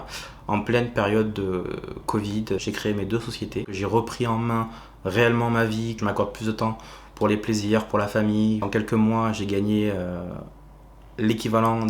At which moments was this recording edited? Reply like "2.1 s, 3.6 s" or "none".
2.6 s, 3.7 s, 5.9 s, 8.7 s

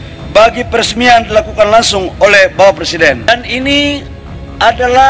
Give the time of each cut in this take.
3.3 s

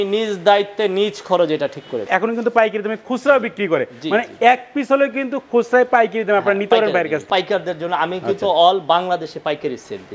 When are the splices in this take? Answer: 2.0 s, 7.2 s

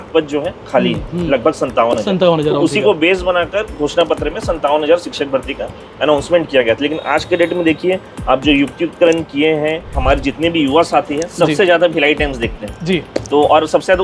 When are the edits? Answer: 9.9 s

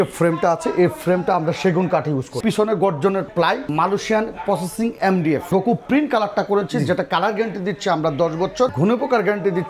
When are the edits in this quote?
2.4 s, 3.7 s, 5.4 s, 8.7 s

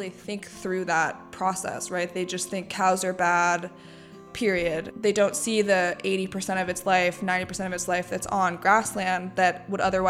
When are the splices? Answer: 4.9 s

